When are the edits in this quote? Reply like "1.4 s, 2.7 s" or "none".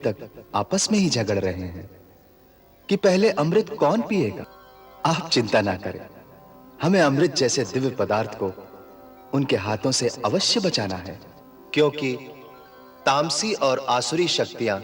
none